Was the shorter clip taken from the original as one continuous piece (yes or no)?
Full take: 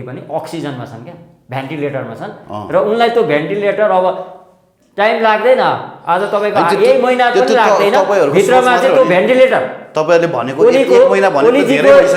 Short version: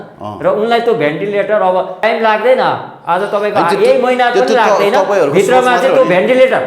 no